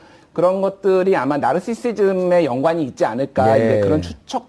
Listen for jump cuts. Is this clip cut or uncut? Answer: cut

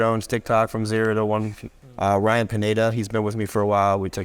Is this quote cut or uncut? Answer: cut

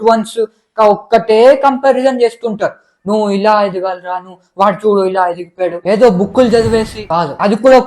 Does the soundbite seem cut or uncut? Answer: cut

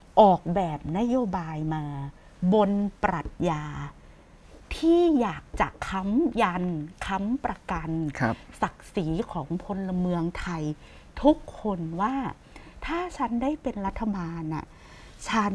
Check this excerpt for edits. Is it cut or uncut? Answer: uncut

